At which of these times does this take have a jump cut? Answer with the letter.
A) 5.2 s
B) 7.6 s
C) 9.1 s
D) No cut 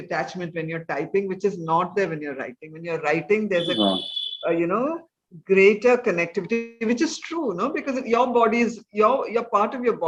D